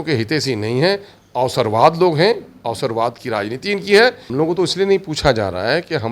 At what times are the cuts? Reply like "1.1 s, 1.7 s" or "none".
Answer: 4.2 s